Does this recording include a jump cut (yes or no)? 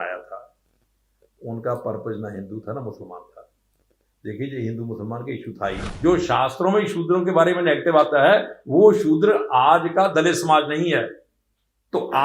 yes